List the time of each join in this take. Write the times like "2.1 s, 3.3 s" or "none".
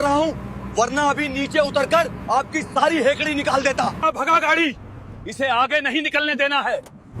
4.0 s